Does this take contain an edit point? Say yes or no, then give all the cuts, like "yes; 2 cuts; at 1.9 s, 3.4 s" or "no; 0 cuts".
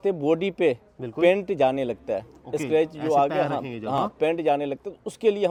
no; 0 cuts